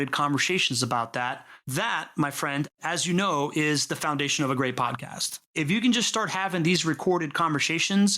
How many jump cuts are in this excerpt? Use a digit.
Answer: 1